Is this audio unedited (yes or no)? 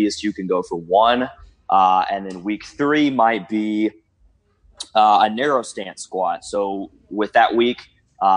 yes